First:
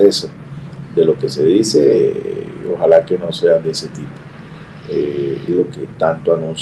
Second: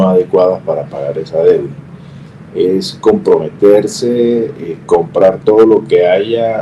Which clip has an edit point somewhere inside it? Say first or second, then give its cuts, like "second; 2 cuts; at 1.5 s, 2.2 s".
first; 1 cut; at 5.5 s